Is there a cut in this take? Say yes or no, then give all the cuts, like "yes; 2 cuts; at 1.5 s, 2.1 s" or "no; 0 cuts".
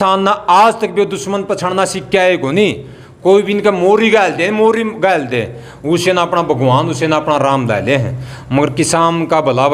no; 0 cuts